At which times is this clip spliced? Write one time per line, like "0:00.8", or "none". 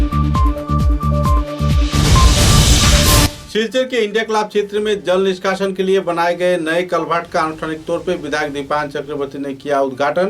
0:03.4